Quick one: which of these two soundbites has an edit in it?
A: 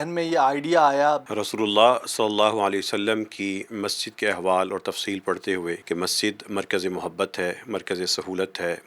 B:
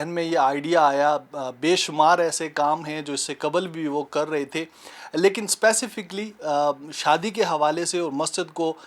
A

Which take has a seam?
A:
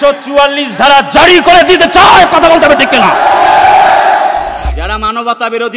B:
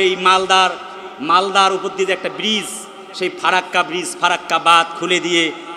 A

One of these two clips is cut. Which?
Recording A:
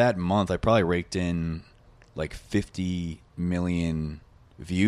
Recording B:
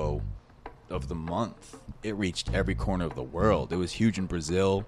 B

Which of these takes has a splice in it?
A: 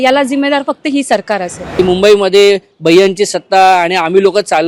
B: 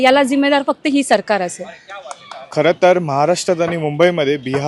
A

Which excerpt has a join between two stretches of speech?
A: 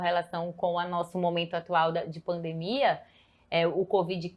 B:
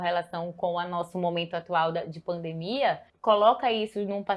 B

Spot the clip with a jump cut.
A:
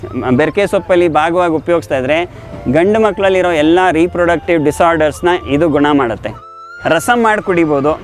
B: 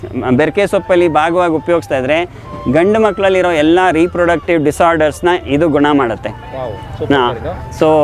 A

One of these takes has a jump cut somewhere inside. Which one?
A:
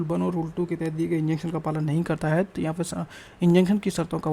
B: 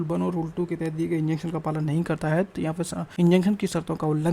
B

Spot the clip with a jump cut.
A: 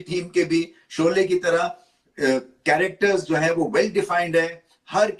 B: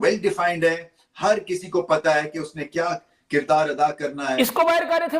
B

